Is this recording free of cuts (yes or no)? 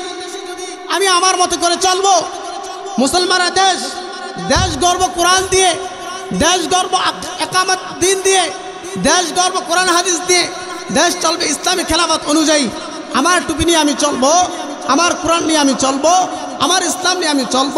yes